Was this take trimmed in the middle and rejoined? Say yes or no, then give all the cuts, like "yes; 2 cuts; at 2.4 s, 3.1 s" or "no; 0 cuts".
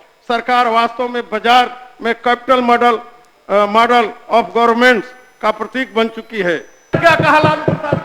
yes; 1 cut; at 7.0 s